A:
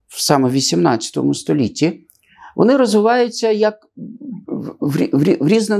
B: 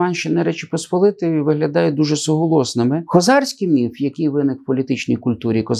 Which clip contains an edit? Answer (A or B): B